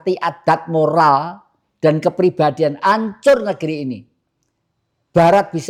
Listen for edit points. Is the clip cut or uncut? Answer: uncut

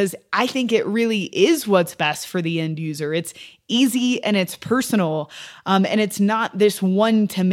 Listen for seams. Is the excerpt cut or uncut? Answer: uncut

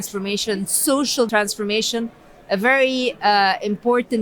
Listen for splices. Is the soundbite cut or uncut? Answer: cut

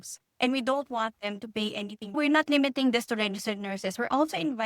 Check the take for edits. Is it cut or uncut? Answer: cut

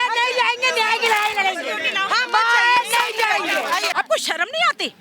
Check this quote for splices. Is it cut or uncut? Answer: cut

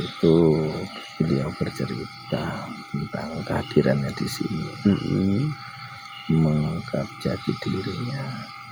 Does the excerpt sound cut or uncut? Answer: uncut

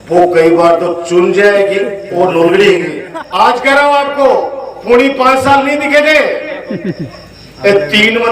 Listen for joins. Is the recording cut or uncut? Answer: cut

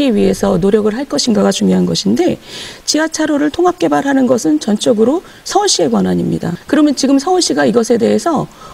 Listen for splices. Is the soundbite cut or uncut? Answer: cut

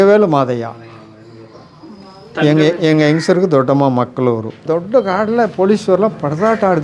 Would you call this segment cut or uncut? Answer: cut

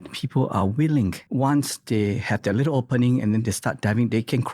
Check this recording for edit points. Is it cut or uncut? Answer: cut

